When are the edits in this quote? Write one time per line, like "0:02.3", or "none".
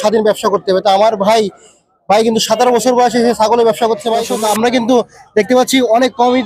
0:04.3